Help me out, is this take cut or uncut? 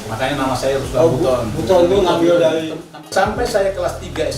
cut